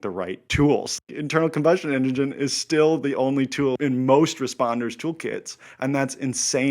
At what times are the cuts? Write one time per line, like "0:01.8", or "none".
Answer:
0:01.0
0:03.7

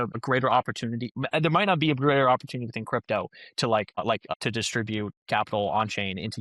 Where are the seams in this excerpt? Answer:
none

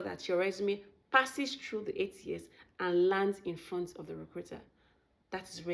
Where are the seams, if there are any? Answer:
none

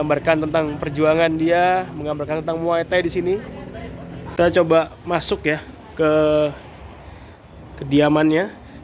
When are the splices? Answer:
0:04.2

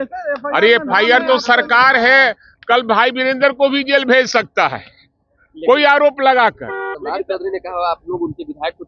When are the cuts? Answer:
0:07.0

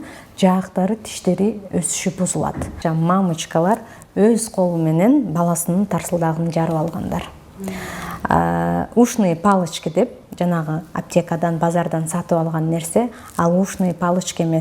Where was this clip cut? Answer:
0:02.7

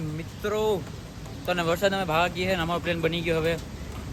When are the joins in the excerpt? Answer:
none

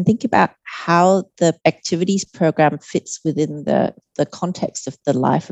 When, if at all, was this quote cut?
0:01.6

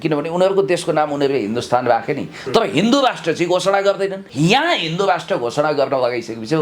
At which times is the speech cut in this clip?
0:04.2

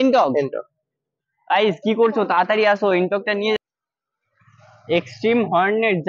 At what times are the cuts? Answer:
0:03.6

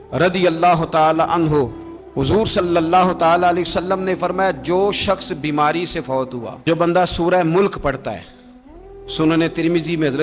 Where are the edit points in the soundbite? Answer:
0:06.6

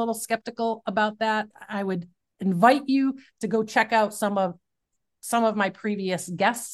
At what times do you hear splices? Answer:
0:01.5

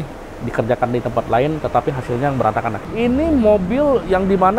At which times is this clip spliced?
0:02.8

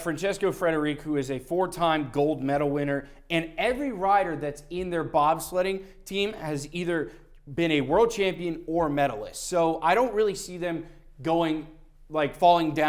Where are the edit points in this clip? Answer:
none

